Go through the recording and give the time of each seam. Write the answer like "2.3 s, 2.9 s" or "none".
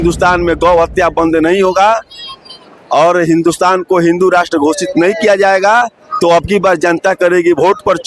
none

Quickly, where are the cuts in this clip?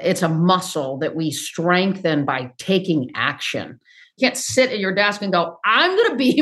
4.2 s

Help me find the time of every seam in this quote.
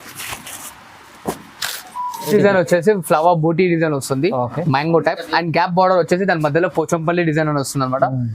2.3 s

